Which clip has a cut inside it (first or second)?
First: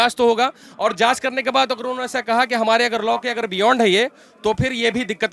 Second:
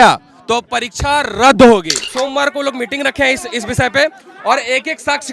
second